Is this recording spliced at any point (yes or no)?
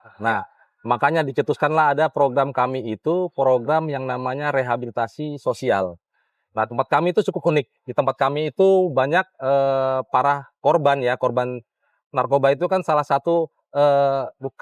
no